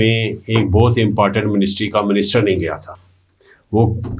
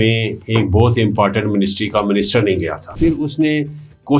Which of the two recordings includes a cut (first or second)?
second